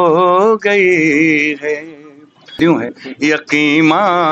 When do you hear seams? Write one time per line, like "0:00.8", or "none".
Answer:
0:02.6

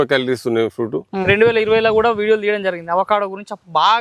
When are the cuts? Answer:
0:01.0

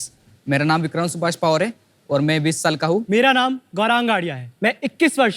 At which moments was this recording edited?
0:03.0
0:04.4

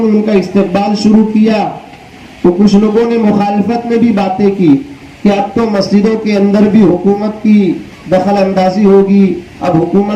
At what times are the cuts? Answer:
none

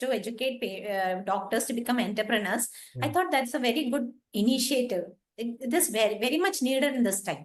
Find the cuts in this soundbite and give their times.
none

